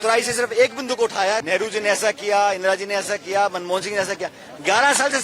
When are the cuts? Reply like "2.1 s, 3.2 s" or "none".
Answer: 1.4 s